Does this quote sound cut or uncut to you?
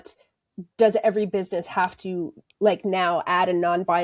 uncut